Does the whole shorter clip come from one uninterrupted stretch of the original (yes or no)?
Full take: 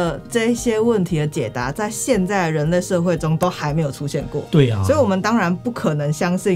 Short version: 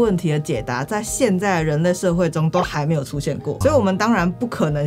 no